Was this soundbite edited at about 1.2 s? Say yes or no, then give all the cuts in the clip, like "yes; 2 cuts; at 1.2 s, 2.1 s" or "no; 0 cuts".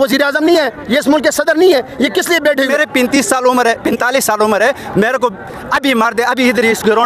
no; 1 cut; at 2.7 s